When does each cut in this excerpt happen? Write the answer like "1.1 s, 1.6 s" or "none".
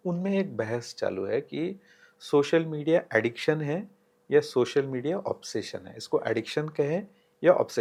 none

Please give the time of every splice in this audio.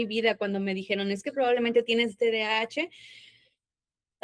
none

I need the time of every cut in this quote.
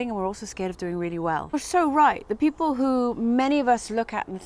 1.5 s

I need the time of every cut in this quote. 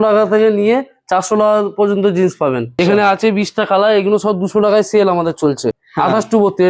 2.8 s, 5.7 s

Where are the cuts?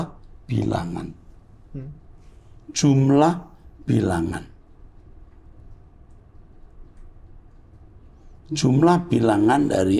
none

